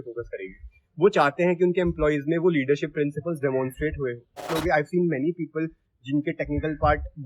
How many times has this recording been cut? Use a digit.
1